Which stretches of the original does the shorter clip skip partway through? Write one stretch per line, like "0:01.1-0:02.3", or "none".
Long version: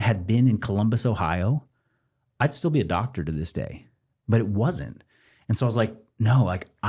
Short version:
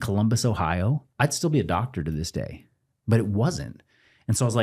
0:01.7-0:02.3